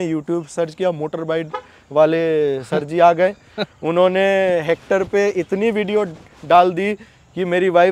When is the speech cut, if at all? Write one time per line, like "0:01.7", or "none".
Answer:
none

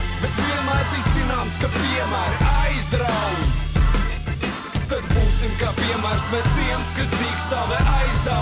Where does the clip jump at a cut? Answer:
none

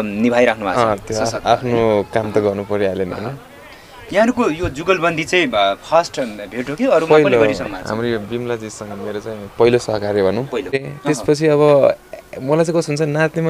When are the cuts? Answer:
0:10.9

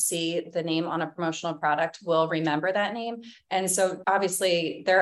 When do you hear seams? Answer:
0:04.0

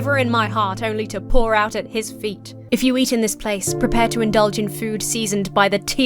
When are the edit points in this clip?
0:02.5

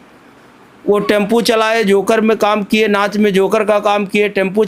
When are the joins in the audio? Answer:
none

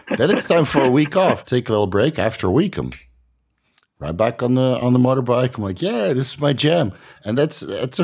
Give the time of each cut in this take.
0:01.4

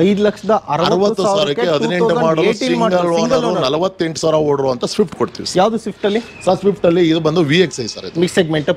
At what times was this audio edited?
none

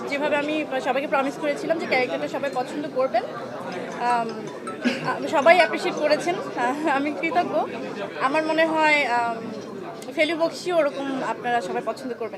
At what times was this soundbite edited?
none

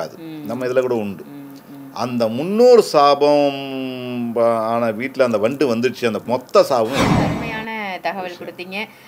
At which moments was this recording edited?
0:06.2
0:07.4

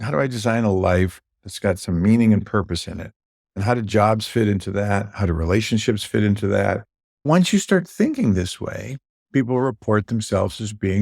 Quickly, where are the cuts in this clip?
0:07.2

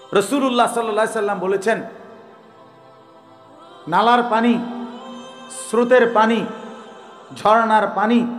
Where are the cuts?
0:02.4
0:03.9

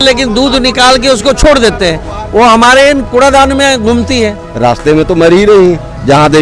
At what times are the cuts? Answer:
0:03.1
0:04.4

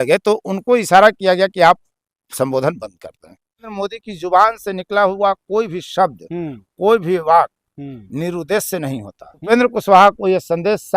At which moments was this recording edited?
0:03.7
0:09.5

